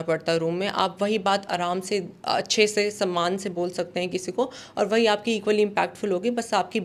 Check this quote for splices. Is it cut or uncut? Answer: uncut